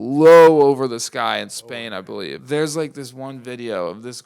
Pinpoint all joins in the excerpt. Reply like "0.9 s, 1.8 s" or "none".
2.4 s